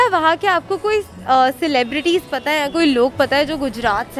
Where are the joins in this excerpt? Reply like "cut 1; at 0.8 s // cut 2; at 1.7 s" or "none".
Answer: none